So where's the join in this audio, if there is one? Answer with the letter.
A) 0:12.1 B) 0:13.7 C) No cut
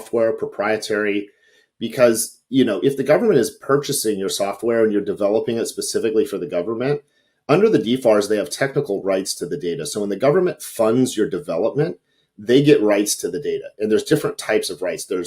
C